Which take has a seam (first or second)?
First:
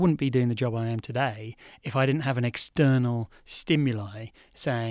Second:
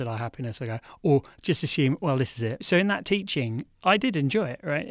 second